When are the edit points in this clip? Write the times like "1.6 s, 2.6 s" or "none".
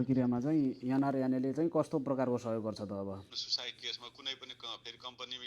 3.4 s